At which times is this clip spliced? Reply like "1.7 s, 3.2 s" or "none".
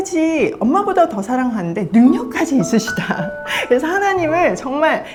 none